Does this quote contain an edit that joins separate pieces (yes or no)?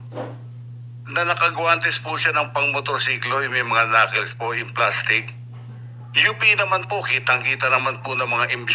no